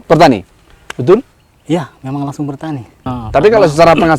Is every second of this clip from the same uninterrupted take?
no; 1 cut; at 3.0 s

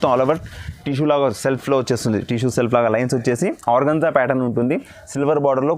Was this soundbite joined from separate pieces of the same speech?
no; 0 cuts

